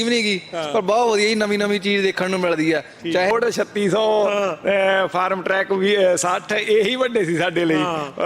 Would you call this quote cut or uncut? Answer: cut